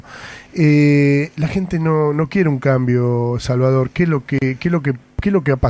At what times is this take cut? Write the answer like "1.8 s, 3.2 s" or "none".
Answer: none